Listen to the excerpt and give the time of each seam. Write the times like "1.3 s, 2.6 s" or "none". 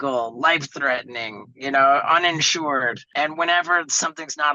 3.0 s